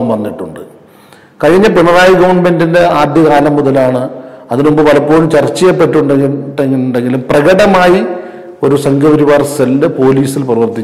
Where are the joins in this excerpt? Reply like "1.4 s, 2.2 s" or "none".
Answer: none